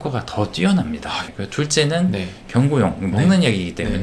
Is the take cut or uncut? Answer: cut